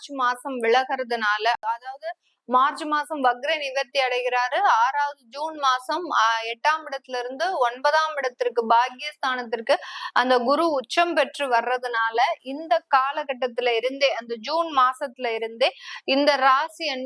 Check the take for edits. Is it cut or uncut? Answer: uncut